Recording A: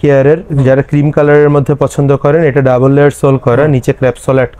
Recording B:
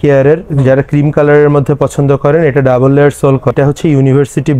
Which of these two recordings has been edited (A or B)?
B